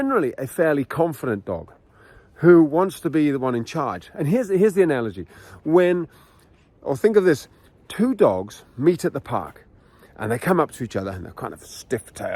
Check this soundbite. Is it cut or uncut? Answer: uncut